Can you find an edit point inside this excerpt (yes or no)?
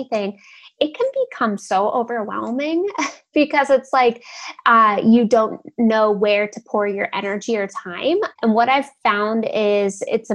yes